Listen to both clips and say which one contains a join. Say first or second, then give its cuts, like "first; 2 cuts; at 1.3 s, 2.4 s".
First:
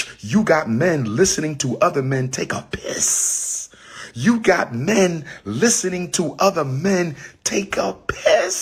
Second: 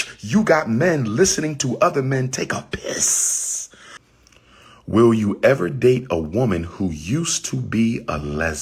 second; 1 cut; at 3.9 s